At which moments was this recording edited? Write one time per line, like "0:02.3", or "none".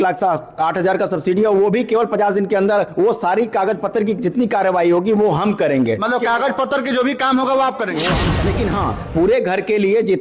0:08.3